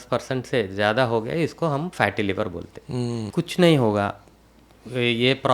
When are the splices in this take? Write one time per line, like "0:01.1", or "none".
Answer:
0:03.2